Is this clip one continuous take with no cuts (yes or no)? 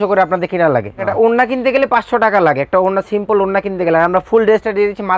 no